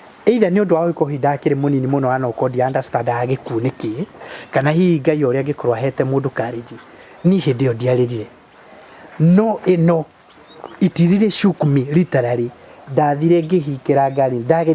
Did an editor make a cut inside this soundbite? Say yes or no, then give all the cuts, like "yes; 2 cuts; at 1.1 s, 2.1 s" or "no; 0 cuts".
no; 0 cuts